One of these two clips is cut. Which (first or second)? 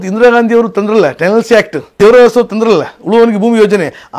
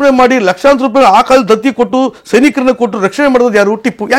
first